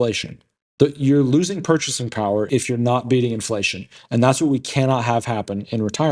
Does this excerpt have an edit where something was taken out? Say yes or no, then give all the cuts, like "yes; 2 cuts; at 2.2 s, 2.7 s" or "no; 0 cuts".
yes; 1 cut; at 2.5 s